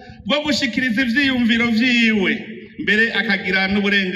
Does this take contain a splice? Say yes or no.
no